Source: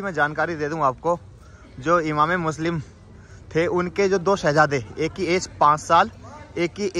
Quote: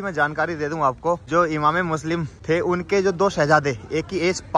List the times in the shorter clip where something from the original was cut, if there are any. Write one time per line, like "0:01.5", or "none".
0:01.2
0:02.3